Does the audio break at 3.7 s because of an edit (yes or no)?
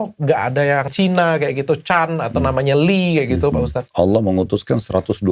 yes